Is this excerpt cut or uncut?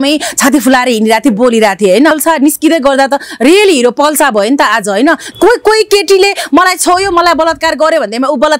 cut